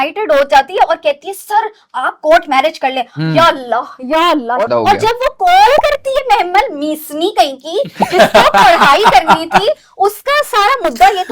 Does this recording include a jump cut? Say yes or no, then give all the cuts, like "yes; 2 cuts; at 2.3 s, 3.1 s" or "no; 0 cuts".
no; 0 cuts